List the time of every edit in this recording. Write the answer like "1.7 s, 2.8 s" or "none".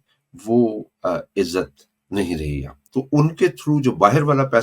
2.7 s